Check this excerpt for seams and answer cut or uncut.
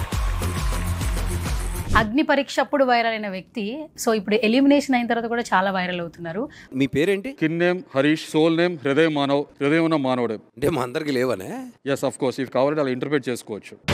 cut